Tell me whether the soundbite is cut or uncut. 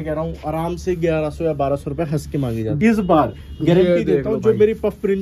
cut